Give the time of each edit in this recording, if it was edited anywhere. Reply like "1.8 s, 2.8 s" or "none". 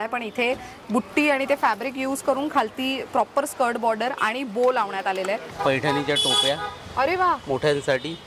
5.5 s